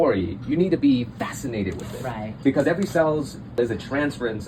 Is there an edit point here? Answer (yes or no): yes